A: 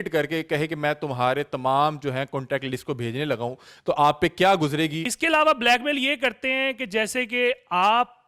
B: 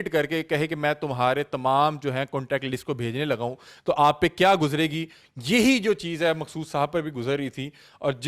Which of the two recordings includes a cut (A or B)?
A